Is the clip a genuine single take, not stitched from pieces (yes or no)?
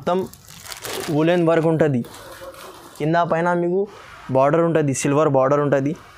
no